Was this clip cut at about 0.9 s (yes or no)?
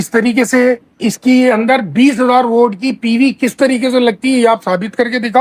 yes